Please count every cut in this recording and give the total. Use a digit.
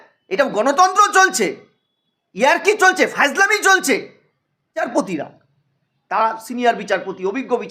1